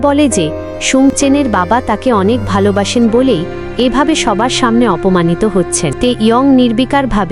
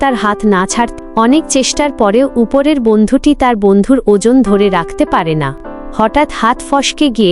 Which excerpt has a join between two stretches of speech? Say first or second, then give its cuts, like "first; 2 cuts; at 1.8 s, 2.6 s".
first; 1 cut; at 5.9 s